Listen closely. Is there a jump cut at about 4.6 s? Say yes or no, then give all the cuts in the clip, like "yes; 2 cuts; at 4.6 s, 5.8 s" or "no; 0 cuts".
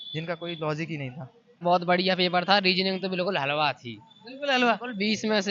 no; 1 cut; at 1.6 s